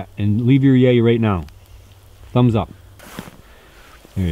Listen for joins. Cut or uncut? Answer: cut